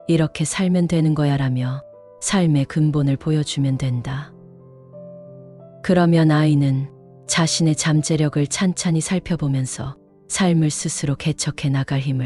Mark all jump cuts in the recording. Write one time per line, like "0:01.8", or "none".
0:04.3
0:05.8